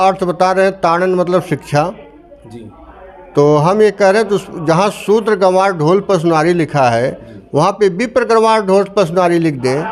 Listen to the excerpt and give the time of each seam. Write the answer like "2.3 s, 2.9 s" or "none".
none